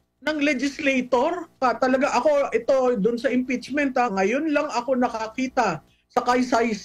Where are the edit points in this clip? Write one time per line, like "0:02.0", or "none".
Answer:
0:01.5